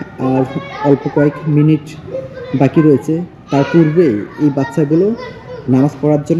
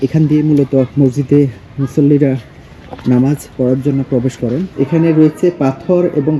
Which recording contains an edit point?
second; 2 cuts; at 0.9 s, 4.7 s

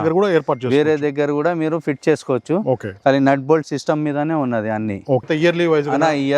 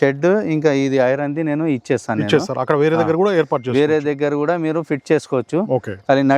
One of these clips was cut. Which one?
first; 1 cut; at 5.3 s

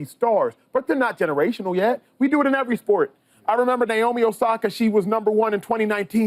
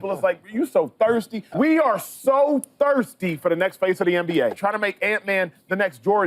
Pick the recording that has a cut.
second; 2 cuts; at 1.4 s, 4.6 s

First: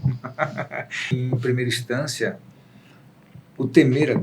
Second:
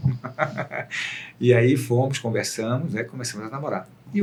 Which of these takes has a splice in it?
first; 1 cut; at 1.1 s

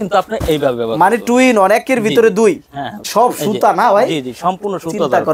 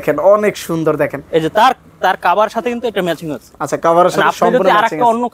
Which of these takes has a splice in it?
first; 1 cut; at 3.0 s

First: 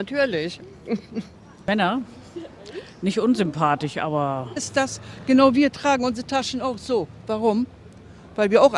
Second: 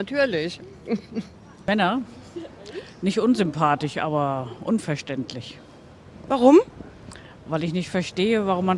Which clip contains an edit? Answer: second; 1 cut; at 4.5 s

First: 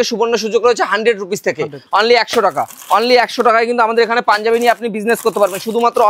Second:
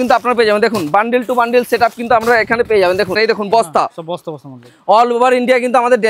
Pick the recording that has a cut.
second; 1 cut; at 3.2 s

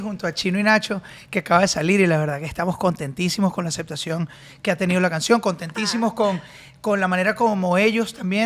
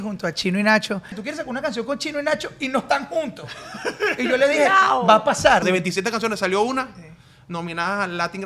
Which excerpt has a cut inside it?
second; 2 cuts; at 1.2 s, 5.6 s

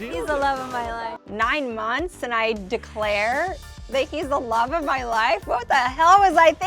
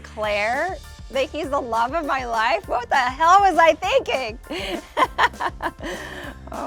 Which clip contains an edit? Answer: first; 1 cut; at 1.1 s

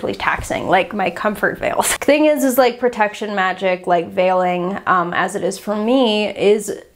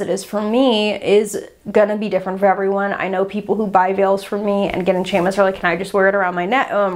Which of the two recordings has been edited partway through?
first; 1 cut; at 1.9 s

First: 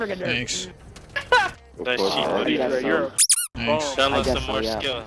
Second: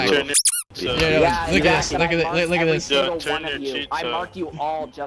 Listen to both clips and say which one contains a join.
first; 1 cut; at 1.6 s

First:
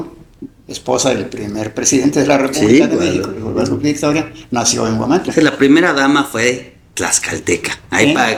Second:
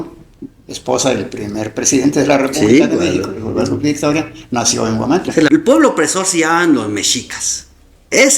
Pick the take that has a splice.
second; 1 cut; at 5.5 s

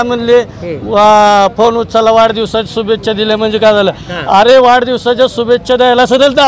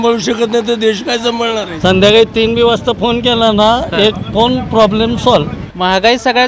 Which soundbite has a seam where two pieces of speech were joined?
second; 2 cuts; at 1.7 s, 5.6 s

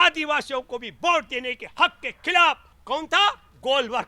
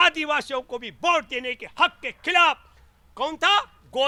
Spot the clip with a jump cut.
first; 1 cut; at 2.7 s

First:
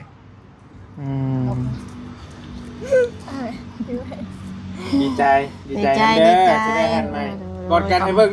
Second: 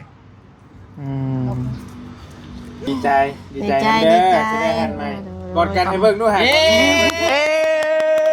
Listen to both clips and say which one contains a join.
second; 1 cut; at 2.9 s

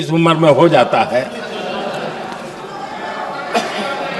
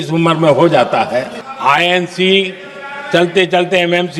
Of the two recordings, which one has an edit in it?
second; 1 cut; at 1.4 s

